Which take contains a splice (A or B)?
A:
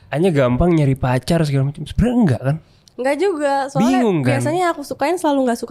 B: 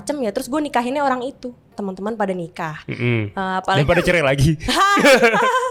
B